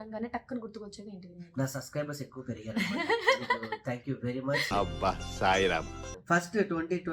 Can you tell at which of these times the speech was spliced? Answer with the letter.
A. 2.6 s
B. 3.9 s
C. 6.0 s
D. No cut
C